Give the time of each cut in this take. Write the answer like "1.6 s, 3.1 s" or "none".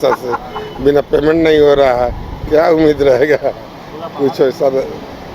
none